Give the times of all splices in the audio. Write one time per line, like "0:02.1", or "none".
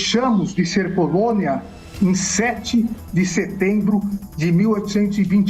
none